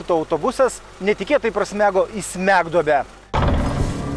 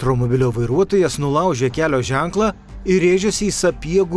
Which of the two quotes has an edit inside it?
first; 1 cut; at 3.2 s

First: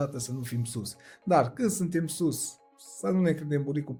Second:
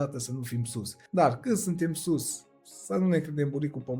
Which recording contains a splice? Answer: second; 1 cut; at 0.9 s

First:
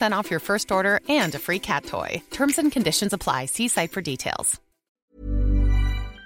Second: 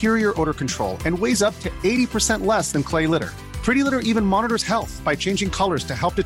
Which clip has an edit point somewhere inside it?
first; 1 cut; at 4.9 s

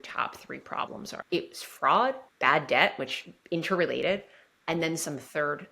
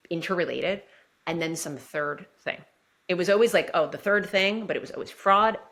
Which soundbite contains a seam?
first; 2 cuts; at 1.2 s, 2.3 s

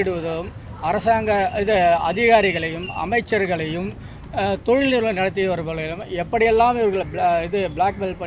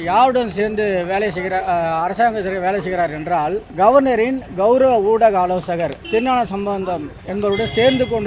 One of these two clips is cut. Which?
second; 2 cuts; at 3.6 s, 6.0 s

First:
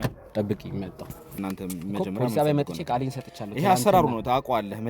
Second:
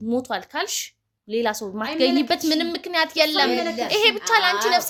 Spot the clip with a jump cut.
first; 1 cut; at 1.3 s

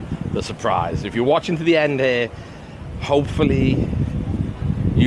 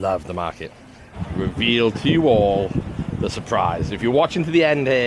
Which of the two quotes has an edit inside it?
second; 1 cut; at 1.2 s

